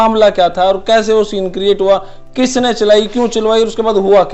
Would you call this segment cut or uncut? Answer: uncut